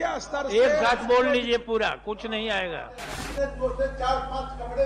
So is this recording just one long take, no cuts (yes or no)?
no